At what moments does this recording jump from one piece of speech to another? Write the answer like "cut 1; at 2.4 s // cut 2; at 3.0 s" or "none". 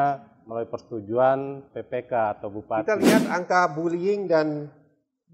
cut 1; at 1.8 s // cut 2; at 2.8 s